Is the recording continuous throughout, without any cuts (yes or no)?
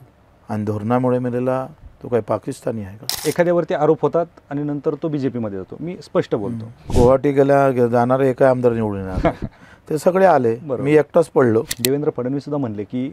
no